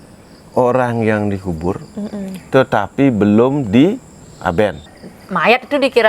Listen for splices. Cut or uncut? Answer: cut